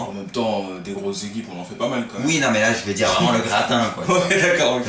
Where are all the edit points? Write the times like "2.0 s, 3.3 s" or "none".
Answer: 1.0 s